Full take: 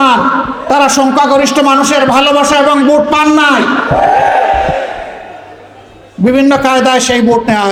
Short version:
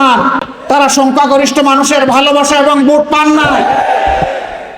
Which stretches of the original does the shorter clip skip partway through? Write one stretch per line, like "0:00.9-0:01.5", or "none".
0:03.5-0:04.0